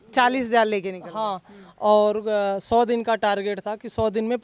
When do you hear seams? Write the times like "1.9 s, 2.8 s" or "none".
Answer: none